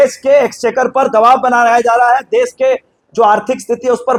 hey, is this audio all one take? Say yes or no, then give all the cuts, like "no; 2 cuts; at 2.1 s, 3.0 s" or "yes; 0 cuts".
yes; 0 cuts